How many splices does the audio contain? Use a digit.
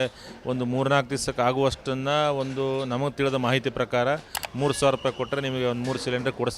1